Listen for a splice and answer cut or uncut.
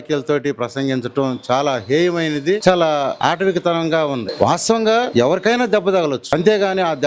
cut